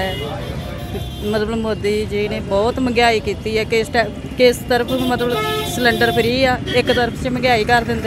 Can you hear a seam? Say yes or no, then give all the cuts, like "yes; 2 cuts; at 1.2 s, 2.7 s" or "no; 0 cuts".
no; 0 cuts